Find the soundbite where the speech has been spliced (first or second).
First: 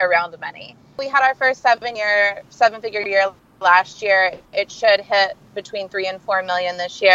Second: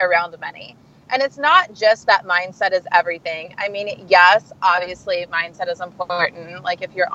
first